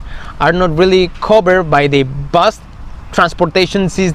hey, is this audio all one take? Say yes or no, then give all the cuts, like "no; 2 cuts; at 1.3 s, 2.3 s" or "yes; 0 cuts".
yes; 0 cuts